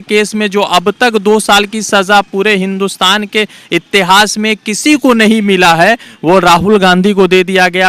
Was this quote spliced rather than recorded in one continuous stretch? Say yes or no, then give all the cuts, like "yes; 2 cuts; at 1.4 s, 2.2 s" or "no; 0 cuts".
no; 0 cuts